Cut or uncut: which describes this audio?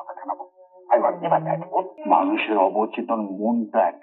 cut